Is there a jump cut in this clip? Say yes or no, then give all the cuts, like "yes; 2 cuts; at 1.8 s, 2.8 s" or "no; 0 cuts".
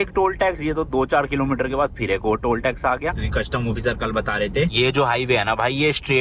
yes; 2 cuts; at 3.2 s, 4.7 s